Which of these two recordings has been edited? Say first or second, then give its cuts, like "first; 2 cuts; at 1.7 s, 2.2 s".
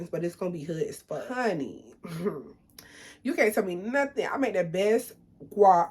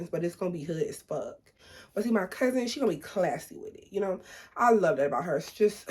first; 1 cut; at 1.3 s